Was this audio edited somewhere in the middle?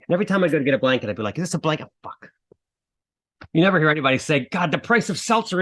yes; 1 cut; at 3.3 s

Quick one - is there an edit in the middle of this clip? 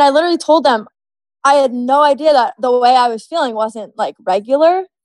yes; 1 cut; at 2.6 s

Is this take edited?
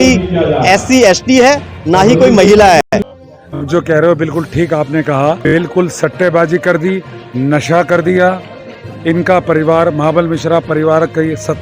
yes; 1 cut; at 2.8 s

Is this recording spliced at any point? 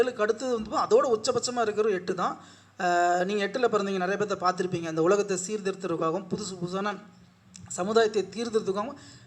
no; 0 cuts

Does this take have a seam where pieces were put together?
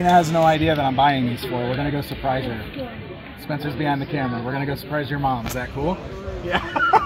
no; 0 cuts

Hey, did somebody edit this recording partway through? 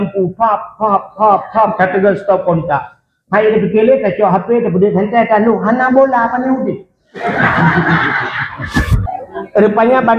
yes; 1 cut; at 9.0 s

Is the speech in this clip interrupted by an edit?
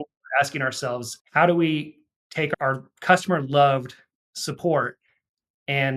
yes; 2 cuts; at 1.1 s, 2.5 s

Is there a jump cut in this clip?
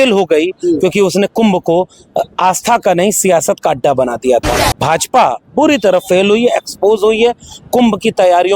yes; 1 cut; at 4.7 s

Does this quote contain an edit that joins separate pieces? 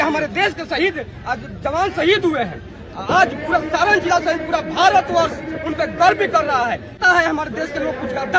yes; 1 cut; at 7.0 s

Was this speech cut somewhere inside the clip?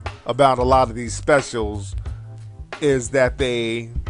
no; 0 cuts

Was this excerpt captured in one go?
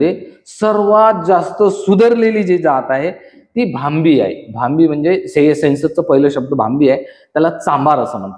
yes; 0 cuts

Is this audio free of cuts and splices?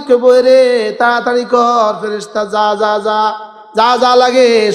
yes; 0 cuts

